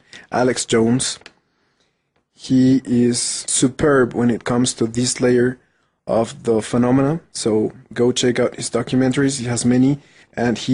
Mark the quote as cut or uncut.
cut